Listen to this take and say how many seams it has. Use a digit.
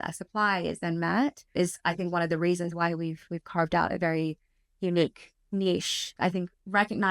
1